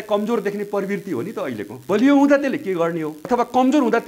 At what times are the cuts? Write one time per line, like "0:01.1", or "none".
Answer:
0:01.8
0:03.2